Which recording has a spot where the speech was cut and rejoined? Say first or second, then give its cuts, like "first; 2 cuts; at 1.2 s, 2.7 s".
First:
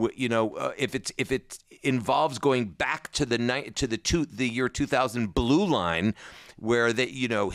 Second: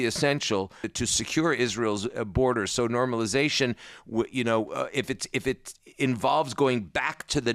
second; 1 cut; at 0.9 s